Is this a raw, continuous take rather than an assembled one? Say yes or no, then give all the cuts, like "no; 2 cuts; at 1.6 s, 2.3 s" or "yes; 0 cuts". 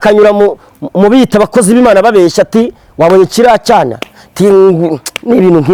yes; 0 cuts